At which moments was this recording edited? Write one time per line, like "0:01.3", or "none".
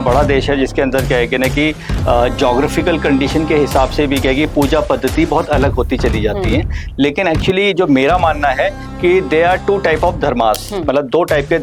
none